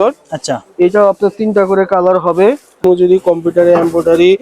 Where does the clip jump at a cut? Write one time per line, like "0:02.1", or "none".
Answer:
0:02.8